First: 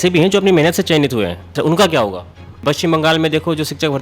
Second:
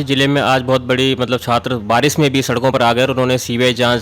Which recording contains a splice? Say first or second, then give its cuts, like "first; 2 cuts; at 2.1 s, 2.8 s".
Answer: first; 2 cuts; at 1.6 s, 2.6 s